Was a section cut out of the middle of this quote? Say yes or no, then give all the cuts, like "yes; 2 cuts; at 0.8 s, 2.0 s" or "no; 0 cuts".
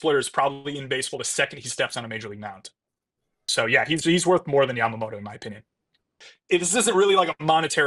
yes; 2 cuts; at 3.4 s, 6.2 s